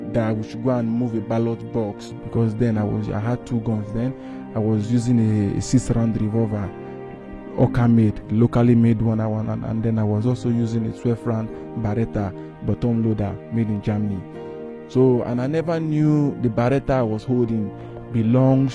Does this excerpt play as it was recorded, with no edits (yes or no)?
no